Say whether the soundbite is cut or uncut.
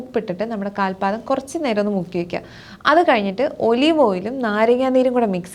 uncut